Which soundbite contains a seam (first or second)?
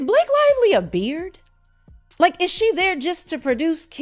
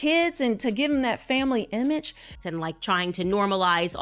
second